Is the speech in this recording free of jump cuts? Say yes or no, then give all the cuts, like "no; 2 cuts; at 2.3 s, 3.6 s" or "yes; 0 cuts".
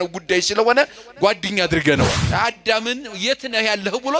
no; 1 cut; at 2.2 s